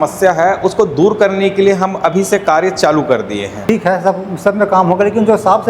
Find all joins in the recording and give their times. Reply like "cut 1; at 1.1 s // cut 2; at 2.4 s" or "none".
cut 1; at 3.6 s